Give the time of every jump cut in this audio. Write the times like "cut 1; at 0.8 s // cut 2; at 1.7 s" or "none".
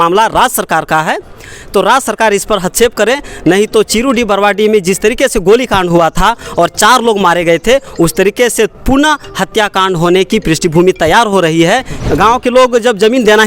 cut 1; at 11.9 s